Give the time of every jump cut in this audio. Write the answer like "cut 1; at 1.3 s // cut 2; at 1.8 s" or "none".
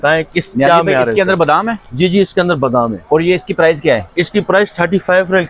none